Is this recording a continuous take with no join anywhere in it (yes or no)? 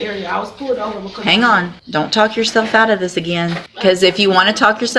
no